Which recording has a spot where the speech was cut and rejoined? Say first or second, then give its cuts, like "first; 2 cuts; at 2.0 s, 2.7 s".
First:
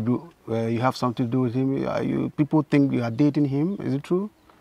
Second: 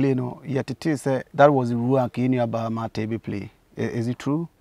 second; 1 cut; at 1.3 s